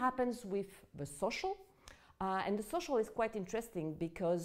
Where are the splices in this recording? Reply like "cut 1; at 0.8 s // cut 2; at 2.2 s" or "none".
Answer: cut 1; at 2.5 s

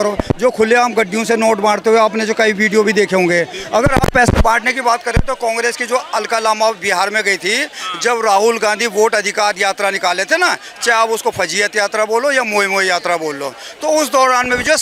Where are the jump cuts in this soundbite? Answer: none

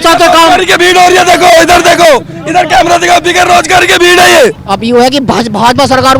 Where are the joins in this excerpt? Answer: cut 1; at 4.7 s

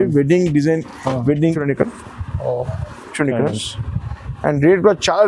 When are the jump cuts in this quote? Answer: cut 1; at 1.6 s

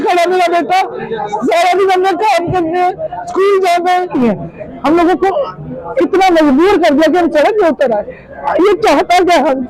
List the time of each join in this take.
cut 1; at 4.1 s

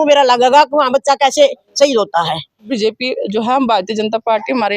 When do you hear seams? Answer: cut 1; at 2.7 s

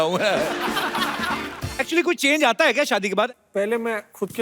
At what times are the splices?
cut 1; at 1.5 s // cut 2; at 3.3 s

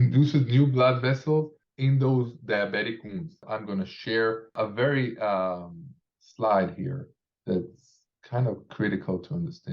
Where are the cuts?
cut 1; at 1.6 s // cut 2; at 3.5 s // cut 3; at 4.5 s

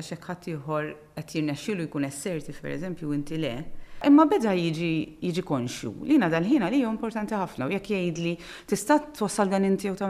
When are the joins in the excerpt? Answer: cut 1; at 4.0 s

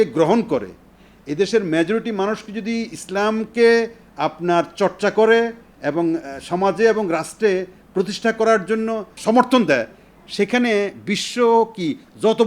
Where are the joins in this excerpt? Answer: cut 1; at 9.1 s

